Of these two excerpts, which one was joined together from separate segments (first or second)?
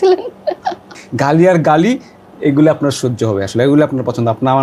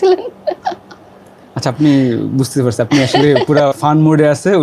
first